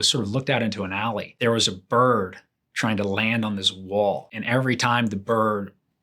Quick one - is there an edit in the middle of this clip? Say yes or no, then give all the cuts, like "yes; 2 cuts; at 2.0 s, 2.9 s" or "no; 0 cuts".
yes; 2 cuts; at 1.3 s, 4.3 s